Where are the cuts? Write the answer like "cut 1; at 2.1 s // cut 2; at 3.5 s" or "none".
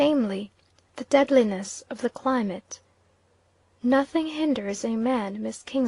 cut 1; at 3.1 s